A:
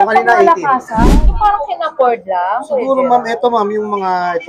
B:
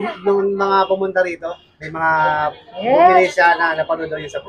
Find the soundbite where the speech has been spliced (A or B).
A